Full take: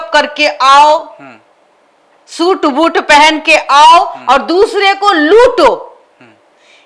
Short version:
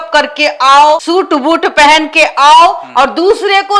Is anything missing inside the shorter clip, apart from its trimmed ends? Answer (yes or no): yes